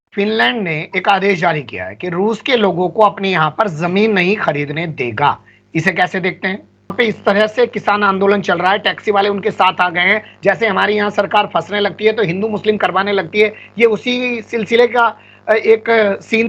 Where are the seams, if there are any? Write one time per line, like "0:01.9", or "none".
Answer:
0:06.9